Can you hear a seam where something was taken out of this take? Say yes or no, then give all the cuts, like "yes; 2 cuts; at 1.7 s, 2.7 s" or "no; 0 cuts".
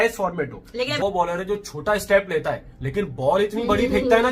yes; 1 cut; at 1.0 s